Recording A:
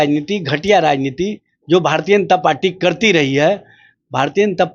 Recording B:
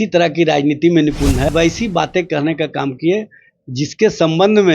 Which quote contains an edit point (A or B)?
B